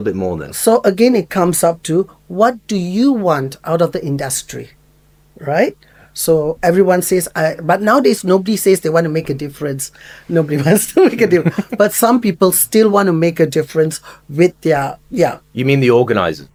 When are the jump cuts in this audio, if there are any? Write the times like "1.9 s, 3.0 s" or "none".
none